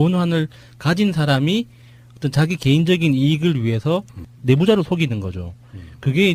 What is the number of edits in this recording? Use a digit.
0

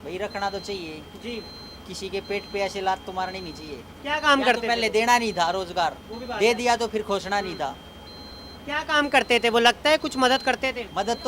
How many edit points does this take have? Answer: 0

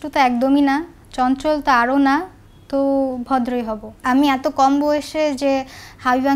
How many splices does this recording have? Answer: 1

